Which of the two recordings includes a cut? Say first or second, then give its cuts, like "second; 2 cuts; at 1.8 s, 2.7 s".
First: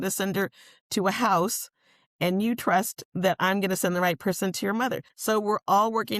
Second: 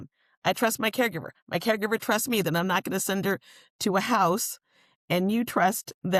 first; 1 cut; at 5.1 s